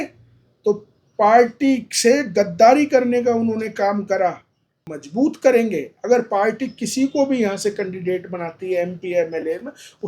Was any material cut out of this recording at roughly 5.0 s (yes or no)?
yes